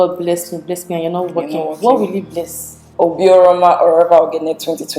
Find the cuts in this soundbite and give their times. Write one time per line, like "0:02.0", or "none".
0:02.9